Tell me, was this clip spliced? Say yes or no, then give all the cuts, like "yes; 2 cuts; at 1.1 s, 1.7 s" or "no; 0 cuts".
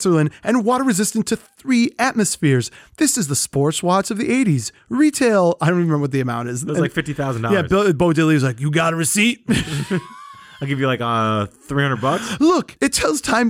no; 0 cuts